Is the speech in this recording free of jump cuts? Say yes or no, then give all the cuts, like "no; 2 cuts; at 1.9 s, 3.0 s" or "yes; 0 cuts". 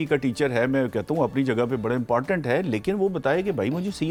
yes; 0 cuts